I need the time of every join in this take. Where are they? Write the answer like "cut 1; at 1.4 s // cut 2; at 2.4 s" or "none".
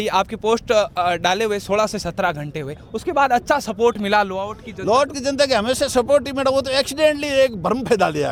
none